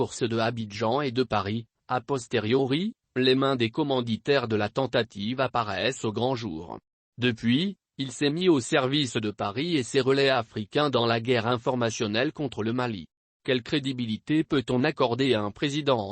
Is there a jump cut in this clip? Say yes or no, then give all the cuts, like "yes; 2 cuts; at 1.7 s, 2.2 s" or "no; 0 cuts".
yes; 1 cut; at 8.2 s